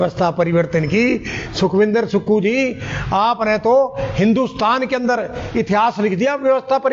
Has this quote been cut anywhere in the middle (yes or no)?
no